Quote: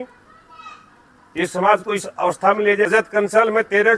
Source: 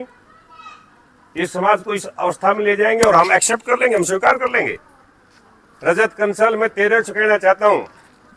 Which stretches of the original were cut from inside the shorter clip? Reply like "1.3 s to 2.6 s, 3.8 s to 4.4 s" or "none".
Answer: 2.9 s to 5.9 s